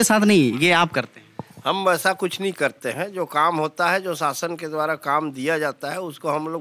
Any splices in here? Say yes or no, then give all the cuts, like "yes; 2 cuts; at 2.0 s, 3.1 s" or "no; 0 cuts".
no; 0 cuts